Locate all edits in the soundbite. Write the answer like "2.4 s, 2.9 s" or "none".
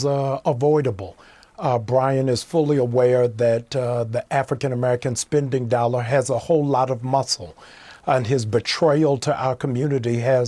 none